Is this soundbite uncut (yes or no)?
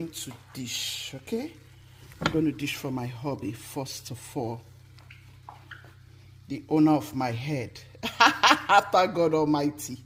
yes